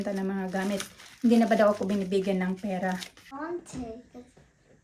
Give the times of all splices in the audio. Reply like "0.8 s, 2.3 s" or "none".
3.3 s